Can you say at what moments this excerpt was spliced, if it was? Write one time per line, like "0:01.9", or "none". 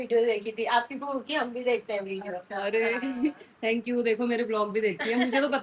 none